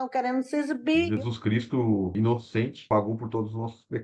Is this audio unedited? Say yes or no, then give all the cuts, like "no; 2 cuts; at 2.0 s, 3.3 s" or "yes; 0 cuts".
yes; 0 cuts